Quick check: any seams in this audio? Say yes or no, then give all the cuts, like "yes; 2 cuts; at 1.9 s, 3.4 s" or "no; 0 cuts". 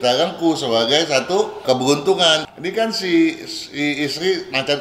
yes; 1 cut; at 2.5 s